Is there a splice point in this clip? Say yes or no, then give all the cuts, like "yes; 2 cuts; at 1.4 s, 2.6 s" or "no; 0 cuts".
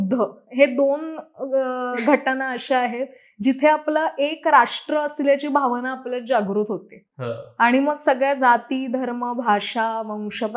no; 0 cuts